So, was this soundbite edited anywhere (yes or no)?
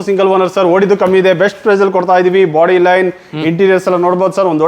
no